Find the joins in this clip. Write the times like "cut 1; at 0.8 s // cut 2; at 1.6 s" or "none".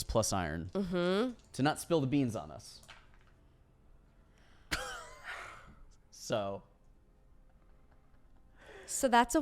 cut 1; at 1.4 s